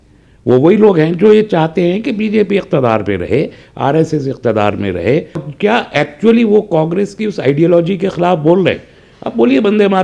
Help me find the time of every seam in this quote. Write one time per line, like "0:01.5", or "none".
0:05.5

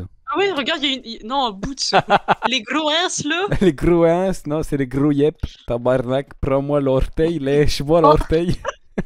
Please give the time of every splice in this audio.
0:02.5
0:05.5

